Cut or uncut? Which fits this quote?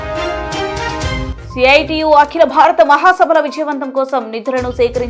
cut